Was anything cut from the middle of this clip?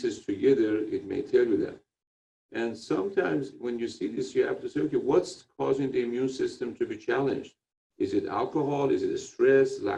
no; 0 cuts

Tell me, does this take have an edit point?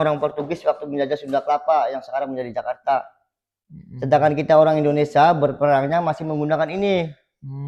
no; 0 cuts

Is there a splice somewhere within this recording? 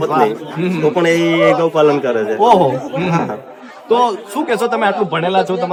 no; 0 cuts

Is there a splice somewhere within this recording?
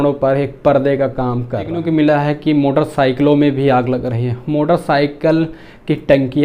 yes; 1 cut; at 1.8 s

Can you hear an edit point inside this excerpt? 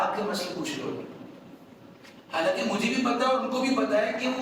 no; 0 cuts

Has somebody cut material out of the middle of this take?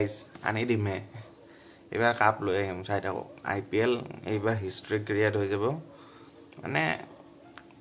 no; 0 cuts

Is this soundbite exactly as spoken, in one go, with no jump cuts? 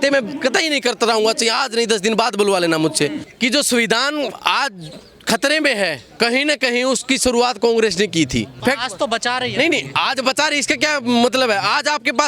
no; 2 cuts; at 3.2 s, 8.6 s

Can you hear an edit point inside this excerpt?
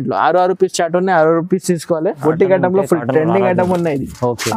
yes; 1 cut; at 2.2 s

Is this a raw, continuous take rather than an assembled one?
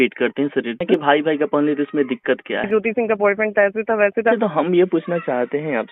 no; 3 cuts; at 0.8 s, 2.6 s, 4.3 s

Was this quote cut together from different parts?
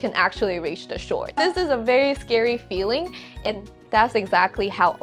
no; 0 cuts

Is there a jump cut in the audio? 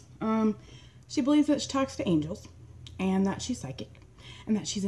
no; 0 cuts

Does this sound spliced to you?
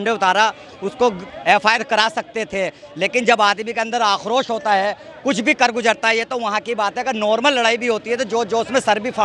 no; 0 cuts

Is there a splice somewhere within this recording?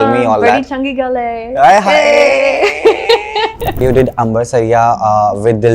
yes; 1 cut; at 3.8 s

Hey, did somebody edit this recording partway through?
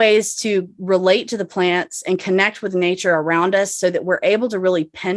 no; 0 cuts

